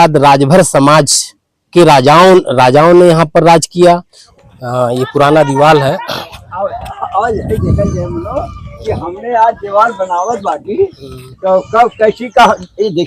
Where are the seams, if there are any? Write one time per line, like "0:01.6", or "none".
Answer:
0:04.2